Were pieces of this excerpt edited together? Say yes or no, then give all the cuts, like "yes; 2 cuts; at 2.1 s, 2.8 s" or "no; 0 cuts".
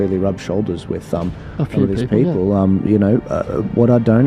no; 0 cuts